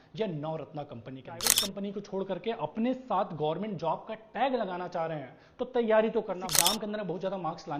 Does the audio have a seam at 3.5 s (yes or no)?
no